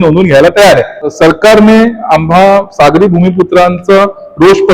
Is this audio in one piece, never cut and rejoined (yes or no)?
no